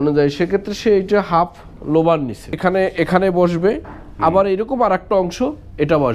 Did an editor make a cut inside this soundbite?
yes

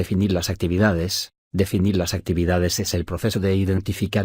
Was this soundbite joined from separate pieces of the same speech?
no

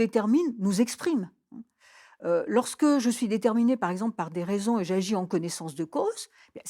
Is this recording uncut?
yes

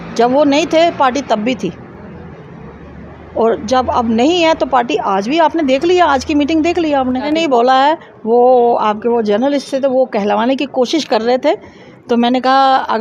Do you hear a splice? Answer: yes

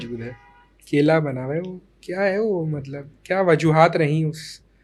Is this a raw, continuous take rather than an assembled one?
yes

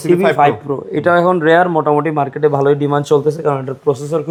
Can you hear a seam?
no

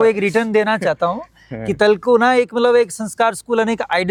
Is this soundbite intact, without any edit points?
yes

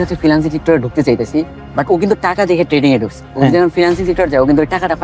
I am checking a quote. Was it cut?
no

